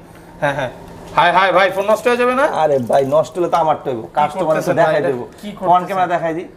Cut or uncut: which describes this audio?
uncut